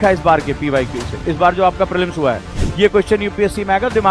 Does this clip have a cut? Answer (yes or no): yes